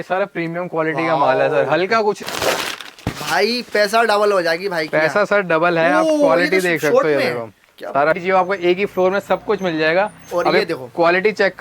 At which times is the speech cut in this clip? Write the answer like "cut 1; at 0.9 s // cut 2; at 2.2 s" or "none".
cut 1; at 2.2 s // cut 2; at 8.2 s